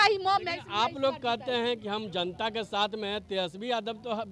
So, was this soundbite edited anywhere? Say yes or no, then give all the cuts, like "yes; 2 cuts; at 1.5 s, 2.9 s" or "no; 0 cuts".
no; 0 cuts